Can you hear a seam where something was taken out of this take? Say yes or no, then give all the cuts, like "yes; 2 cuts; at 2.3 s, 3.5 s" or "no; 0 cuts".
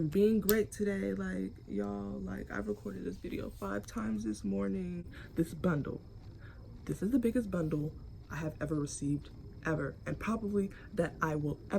yes; 1 cut; at 5.2 s